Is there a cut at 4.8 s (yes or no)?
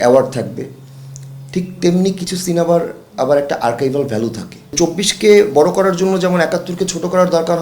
yes